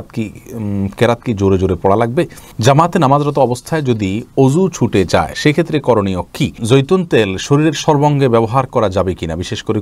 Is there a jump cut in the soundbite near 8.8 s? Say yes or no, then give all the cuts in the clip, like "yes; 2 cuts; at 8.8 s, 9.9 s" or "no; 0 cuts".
no; 2 cuts; at 2.4 s, 6.6 s